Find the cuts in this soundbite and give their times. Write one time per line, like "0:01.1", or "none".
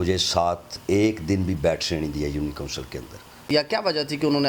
0:03.5

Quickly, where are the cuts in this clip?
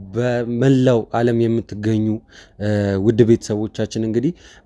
none

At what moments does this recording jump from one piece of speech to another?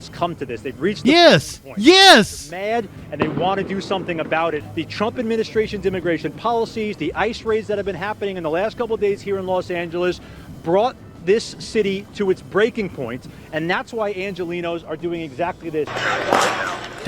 0:04.6
0:15.9

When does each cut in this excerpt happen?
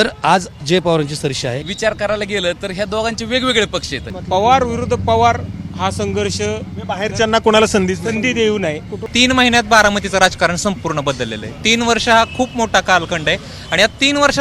0:01.6
0:04.1
0:08.9

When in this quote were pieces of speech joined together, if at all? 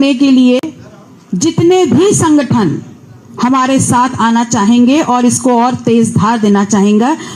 none

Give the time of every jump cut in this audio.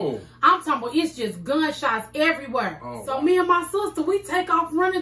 0:02.9

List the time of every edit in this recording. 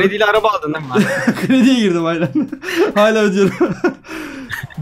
none

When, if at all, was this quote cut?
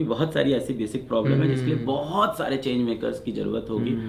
none

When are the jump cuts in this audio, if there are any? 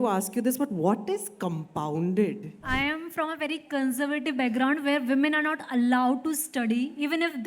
0:02.6

